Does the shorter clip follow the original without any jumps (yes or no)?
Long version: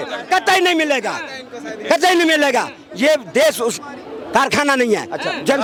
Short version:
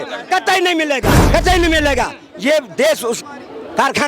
no